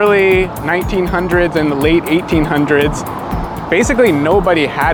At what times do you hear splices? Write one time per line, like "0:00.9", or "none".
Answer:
none